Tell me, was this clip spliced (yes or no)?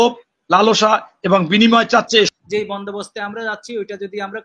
yes